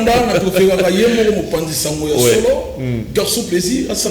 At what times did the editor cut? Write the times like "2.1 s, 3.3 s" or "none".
none